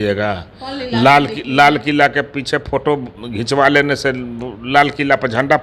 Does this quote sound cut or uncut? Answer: uncut